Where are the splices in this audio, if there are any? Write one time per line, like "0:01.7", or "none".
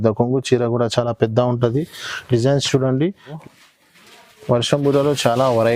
0:03.4